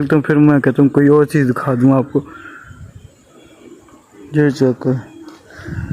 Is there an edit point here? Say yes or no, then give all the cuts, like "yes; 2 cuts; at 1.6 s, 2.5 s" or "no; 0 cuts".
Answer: no; 0 cuts